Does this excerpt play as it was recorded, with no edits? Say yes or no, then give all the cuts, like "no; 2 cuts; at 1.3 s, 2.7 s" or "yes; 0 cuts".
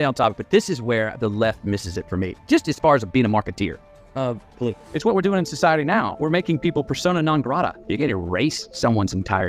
yes; 0 cuts